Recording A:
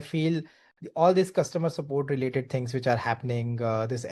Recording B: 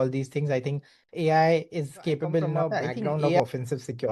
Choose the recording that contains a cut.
B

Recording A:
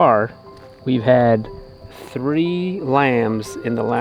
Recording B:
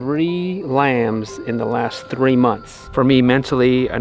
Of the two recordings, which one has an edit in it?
B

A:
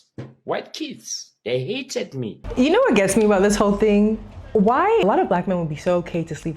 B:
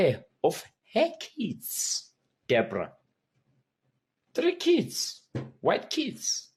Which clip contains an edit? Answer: A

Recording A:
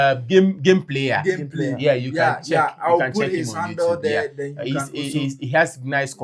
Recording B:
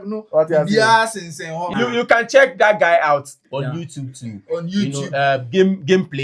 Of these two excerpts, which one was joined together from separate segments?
B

